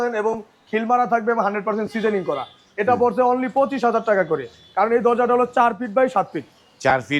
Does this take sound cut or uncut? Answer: uncut